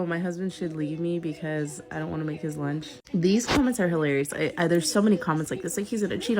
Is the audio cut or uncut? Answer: uncut